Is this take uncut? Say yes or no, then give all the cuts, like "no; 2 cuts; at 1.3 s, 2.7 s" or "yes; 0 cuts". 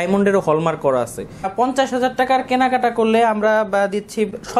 no; 1 cut; at 1.5 s